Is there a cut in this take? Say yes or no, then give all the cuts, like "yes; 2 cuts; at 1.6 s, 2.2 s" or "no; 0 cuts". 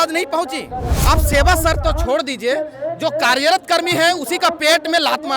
yes; 1 cut; at 0.9 s